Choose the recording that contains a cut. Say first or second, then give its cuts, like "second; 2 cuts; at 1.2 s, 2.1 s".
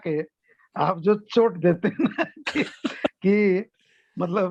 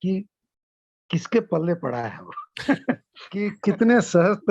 second; 1 cut; at 3.5 s